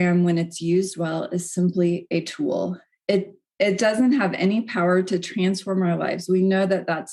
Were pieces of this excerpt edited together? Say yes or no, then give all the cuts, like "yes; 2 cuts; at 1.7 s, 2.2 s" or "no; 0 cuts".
no; 0 cuts